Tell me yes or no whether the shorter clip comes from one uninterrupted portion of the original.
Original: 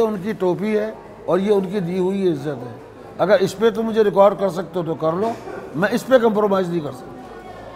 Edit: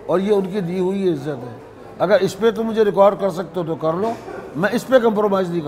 yes